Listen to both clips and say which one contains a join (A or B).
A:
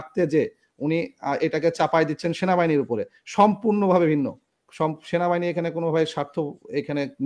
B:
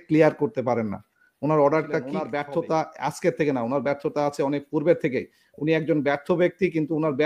B